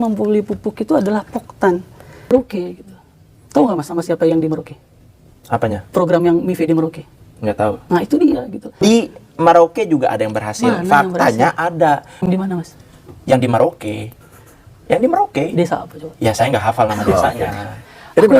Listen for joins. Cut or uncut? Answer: cut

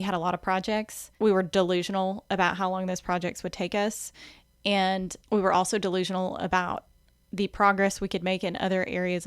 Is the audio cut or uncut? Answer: cut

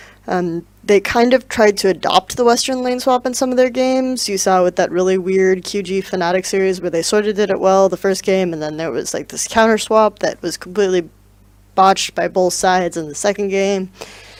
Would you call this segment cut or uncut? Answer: uncut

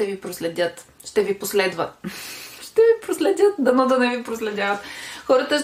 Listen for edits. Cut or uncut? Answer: uncut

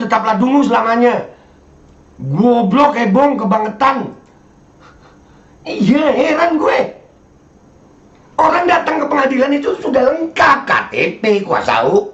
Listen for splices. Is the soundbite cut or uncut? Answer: uncut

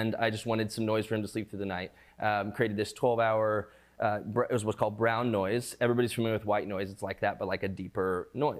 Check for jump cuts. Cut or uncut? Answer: uncut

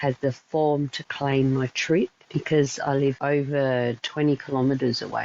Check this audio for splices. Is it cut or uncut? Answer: cut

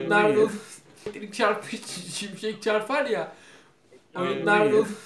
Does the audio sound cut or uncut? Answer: cut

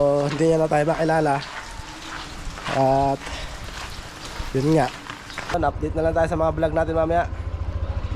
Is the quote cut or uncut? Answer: cut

